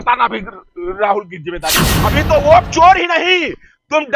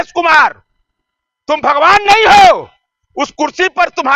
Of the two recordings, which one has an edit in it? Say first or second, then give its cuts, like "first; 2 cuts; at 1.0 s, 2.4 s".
first; 1 cut; at 1.9 s